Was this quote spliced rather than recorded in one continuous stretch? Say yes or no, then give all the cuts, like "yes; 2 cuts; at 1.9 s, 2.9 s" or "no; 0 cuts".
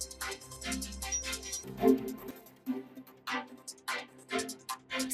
yes; 1 cut; at 1.6 s